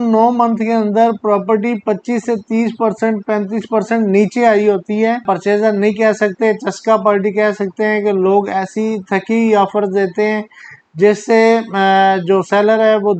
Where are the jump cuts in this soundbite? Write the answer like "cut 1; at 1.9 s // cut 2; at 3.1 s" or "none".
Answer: cut 1; at 5.2 s